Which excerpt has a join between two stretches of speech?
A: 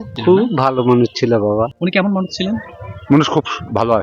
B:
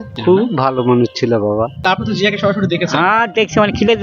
B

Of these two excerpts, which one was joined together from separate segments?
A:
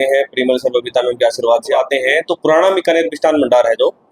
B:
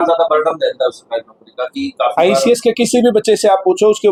A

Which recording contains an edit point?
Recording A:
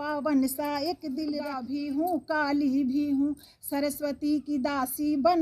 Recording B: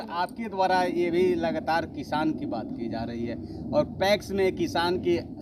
A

